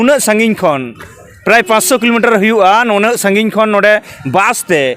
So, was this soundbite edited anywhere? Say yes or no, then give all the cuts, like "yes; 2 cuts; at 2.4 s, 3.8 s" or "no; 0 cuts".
no; 0 cuts